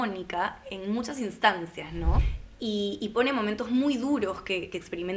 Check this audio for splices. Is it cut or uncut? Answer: cut